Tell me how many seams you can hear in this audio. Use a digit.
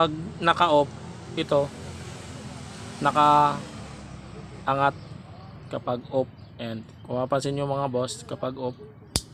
0